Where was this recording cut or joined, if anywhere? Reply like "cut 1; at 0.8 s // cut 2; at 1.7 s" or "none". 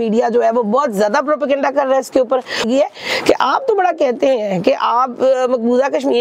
cut 1; at 2.7 s